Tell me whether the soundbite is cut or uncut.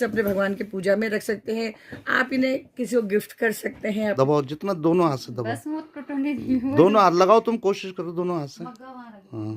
cut